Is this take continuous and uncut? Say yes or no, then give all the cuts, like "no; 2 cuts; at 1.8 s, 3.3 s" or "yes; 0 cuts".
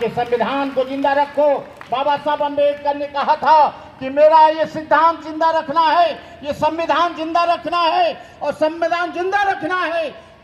yes; 0 cuts